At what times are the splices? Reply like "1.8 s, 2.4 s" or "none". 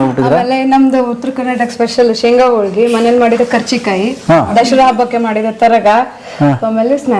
none